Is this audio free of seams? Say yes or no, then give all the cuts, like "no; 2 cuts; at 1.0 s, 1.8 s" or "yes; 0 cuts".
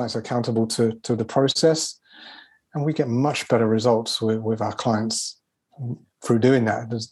yes; 0 cuts